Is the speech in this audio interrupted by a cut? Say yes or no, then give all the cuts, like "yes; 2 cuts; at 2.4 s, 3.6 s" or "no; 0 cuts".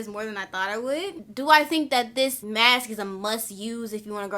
yes; 2 cuts; at 1.2 s, 2.4 s